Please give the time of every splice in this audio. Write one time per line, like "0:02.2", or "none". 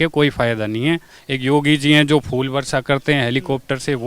0:01.2